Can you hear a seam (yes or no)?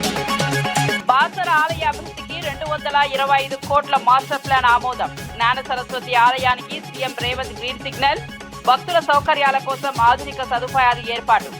yes